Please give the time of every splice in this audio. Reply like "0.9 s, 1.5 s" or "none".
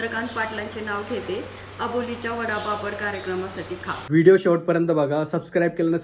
4.0 s